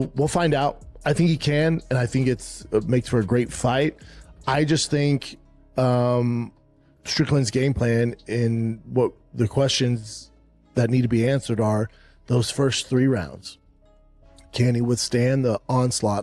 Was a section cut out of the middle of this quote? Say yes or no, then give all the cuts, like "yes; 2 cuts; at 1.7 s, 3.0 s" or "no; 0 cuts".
no; 0 cuts